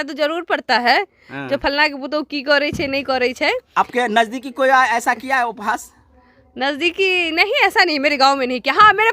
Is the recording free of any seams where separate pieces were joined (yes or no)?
yes